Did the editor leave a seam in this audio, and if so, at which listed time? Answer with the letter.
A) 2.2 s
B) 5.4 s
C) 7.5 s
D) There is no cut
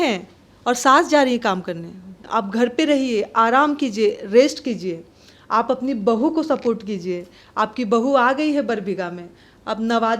A